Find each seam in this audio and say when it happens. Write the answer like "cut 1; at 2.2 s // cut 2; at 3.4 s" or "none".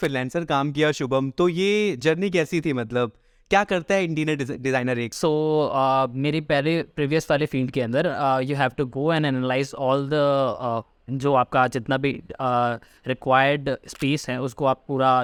none